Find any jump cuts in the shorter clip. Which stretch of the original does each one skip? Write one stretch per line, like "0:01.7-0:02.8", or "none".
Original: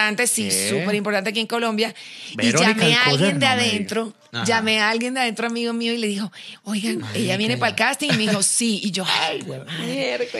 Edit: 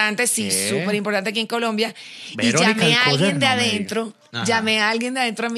none

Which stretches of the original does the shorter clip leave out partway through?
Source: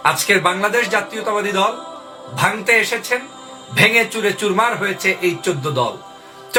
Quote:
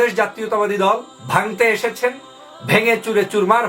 0:01.9-0:02.2

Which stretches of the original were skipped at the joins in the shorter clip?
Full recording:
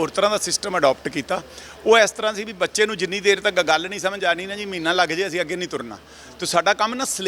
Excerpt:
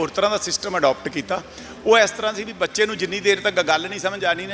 none

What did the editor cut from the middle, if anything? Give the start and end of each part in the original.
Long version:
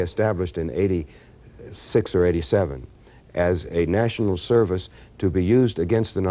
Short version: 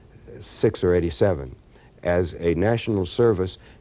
none

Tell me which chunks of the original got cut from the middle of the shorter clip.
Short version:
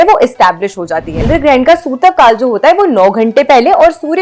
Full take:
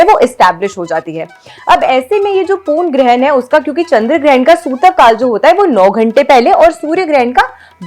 0:01.2-0:04.0

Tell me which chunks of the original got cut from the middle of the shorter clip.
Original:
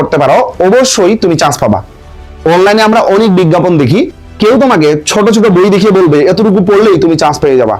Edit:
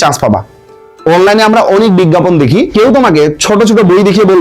0:04.1-0:04.4

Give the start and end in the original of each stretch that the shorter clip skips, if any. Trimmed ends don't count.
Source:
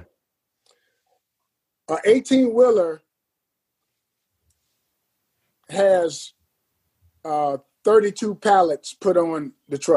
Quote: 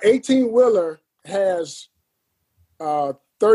0:03.1-0:05.6

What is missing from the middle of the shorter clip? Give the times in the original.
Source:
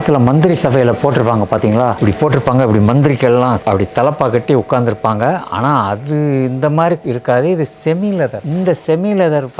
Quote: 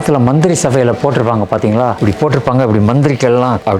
none

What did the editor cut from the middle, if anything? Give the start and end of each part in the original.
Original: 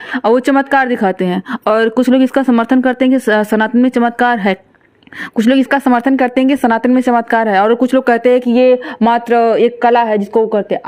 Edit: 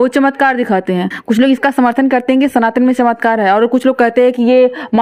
0:01.5-0:05.2

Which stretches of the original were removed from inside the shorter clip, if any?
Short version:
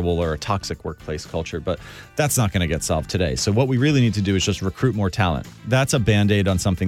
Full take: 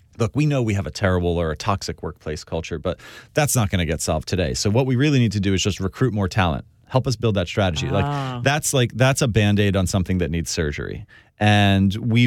0:06.8-0:08.9

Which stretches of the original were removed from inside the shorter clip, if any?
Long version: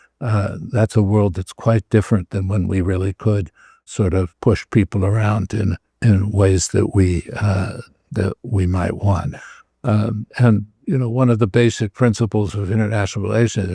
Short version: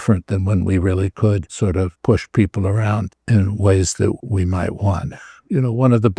0:03.9-0:04.3
0:05.5-0:05.9
0:06.9-0:08.4
0:09.6-0:10.7

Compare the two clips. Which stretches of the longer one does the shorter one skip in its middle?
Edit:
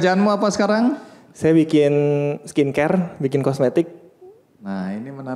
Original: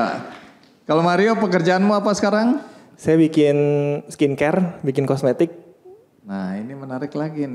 none

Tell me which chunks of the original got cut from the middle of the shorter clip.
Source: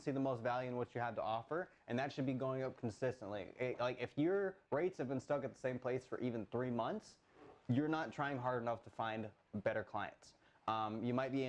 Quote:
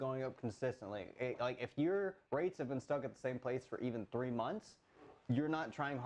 none

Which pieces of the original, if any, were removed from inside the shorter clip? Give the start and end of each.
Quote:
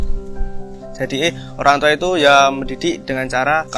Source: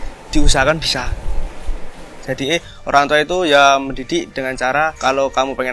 none

